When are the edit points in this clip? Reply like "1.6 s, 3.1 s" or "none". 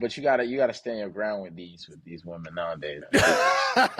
3.0 s

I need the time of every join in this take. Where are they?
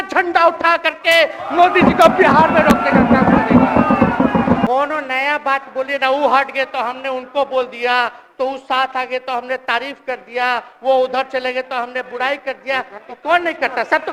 4.7 s

